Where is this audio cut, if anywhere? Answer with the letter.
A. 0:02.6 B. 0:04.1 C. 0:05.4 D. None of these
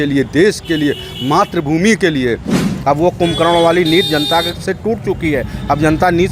A